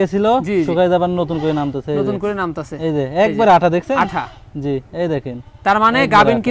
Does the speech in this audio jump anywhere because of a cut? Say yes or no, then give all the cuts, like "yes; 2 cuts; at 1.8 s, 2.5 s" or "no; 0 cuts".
no; 0 cuts